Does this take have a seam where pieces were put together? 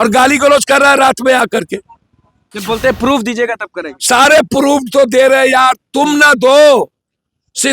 yes; 1 cut; at 2.5 s

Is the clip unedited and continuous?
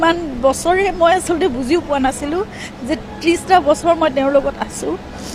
yes; 0 cuts

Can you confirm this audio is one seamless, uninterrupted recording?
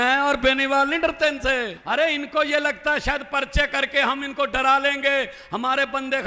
no; 1 cut; at 1.8 s

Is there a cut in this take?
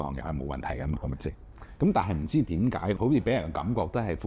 yes; 1 cut; at 3.0 s

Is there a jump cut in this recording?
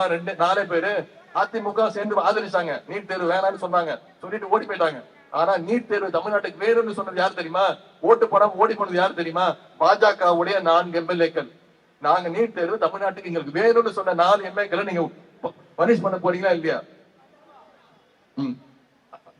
no; 0 cuts

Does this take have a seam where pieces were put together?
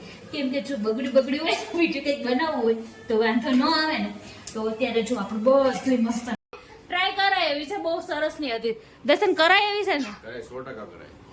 yes; 1 cut; at 6.5 s

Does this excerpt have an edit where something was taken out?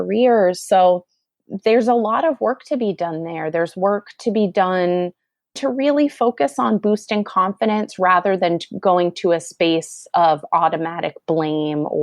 yes; 1 cut; at 5.6 s

